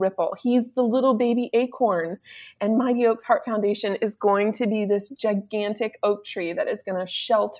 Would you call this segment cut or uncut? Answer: uncut